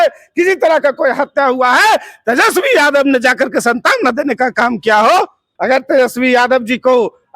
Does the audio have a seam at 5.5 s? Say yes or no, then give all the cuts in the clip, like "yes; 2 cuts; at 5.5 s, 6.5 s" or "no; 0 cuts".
yes; 1 cut; at 5.5 s